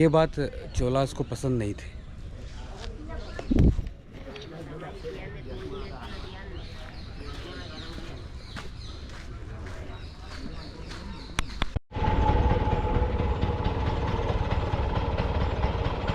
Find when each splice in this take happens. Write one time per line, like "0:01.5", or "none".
none

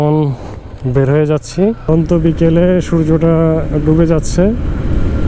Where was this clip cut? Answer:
0:01.9

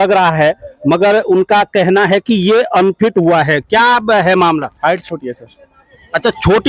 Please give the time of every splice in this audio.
none

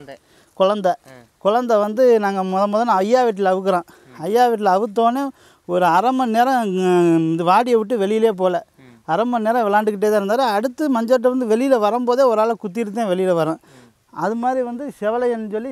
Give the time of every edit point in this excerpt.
none

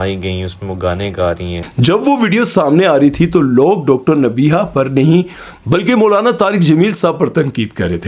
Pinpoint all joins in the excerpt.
none

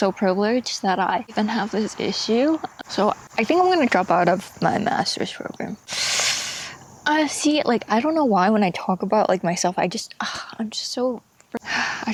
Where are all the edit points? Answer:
none

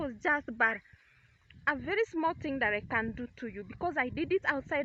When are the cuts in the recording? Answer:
none

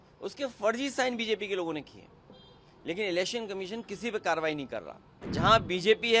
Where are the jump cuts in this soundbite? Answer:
0:05.3

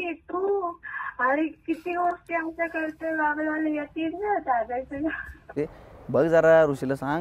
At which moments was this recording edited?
0:05.5

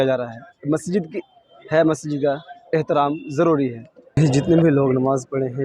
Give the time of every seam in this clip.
0:03.9

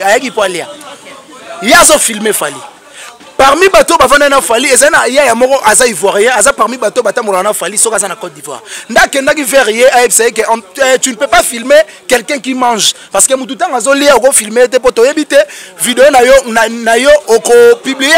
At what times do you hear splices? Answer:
none

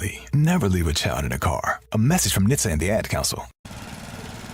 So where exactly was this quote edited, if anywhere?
0:03.5

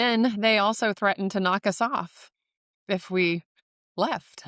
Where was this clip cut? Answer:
none

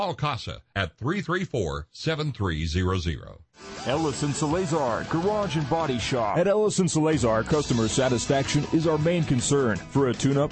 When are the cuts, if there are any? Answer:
0:03.7

